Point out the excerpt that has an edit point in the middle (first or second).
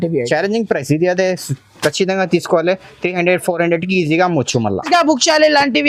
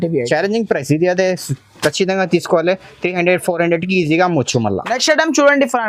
first